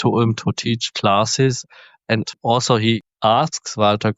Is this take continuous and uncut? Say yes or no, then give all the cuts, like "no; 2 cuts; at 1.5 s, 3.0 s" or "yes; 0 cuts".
no; 1 cut; at 3.0 s